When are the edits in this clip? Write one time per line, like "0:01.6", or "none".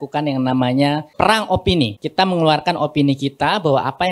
0:01.1
0:02.0